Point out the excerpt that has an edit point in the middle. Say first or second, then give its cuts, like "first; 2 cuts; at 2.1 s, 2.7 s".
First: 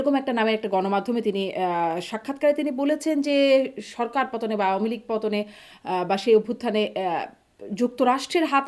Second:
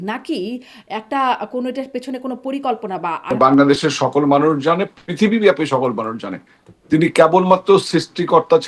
second; 1 cut; at 3.2 s